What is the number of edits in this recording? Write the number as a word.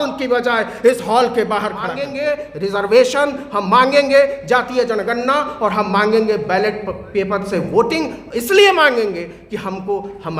one